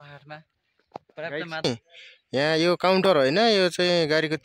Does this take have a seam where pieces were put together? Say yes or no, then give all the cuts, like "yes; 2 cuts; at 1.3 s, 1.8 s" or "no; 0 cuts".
yes; 1 cut; at 1.6 s